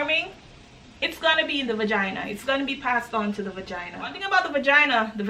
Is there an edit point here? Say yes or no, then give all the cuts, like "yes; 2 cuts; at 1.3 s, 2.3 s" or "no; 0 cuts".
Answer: yes; 1 cut; at 4.2 s